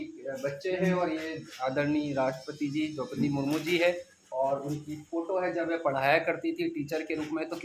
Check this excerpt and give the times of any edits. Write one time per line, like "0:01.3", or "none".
none